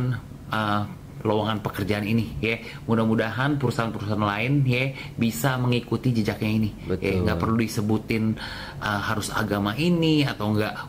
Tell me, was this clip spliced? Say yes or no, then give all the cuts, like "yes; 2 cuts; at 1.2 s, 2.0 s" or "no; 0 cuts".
no; 0 cuts